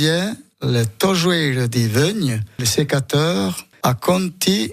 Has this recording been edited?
yes; 2 cuts; at 2.6 s, 3.6 s

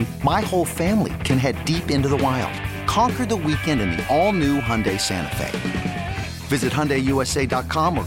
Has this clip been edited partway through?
no; 0 cuts

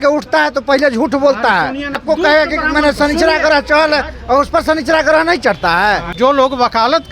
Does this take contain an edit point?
yes; 2 cuts; at 2.0 s, 6.1 s

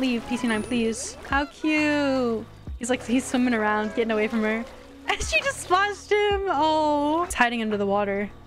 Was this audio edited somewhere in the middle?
yes; 2 cuts; at 1.2 s, 7.3 s

